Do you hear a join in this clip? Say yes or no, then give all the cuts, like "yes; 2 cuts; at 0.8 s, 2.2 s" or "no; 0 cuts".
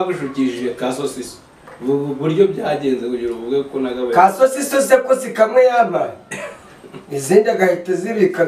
no; 0 cuts